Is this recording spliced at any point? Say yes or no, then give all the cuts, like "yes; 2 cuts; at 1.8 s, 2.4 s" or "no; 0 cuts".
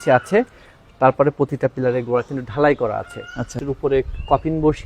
yes; 1 cut; at 3.6 s